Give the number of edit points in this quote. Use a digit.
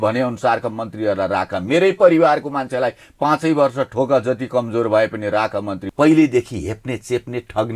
1